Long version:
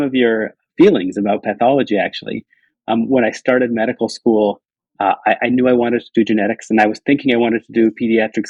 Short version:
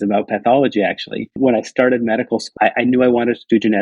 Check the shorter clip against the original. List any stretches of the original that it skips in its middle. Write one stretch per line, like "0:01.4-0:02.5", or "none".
0:02.5-0:03.1
0:04.2-0:05.2